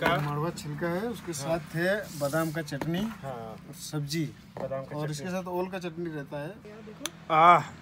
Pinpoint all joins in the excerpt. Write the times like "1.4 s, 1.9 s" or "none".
6.7 s

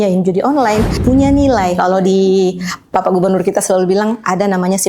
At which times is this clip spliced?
0.9 s

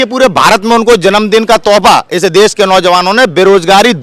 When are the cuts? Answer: none

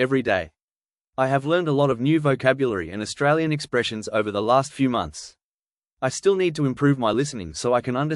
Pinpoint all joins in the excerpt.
1.0 s, 5.9 s

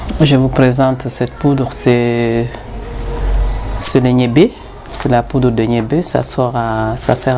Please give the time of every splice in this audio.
1.1 s

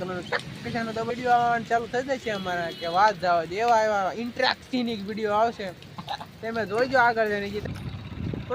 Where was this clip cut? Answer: 1.1 s, 7.6 s

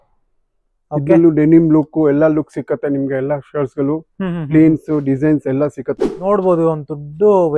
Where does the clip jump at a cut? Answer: 6.1 s

